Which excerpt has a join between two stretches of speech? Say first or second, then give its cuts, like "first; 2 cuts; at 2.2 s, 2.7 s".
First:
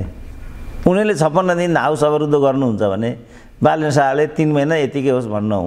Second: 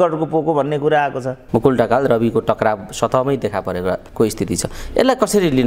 second; 2 cuts; at 1.3 s, 4.1 s